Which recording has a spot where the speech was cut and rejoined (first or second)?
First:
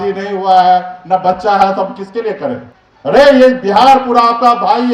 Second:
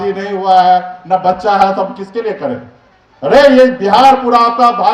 first